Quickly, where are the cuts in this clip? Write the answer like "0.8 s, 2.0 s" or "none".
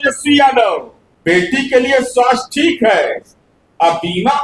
1.2 s